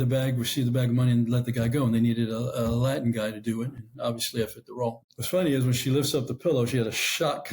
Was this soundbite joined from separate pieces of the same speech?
yes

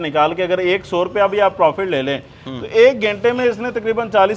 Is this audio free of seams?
yes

